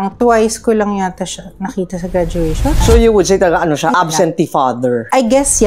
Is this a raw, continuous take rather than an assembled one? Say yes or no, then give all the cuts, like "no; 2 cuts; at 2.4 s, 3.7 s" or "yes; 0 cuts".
no; 2 cuts; at 2.8 s, 3.9 s